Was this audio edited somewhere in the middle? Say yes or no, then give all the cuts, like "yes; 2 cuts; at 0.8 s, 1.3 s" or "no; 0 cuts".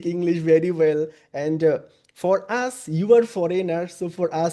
no; 0 cuts